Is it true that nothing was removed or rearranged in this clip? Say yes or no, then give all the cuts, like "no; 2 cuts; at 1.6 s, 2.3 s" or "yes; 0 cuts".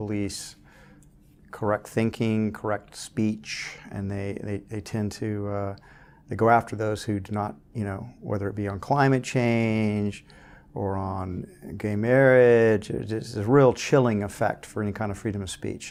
yes; 0 cuts